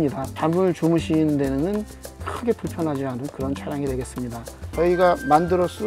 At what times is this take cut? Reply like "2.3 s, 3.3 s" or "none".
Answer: 4.5 s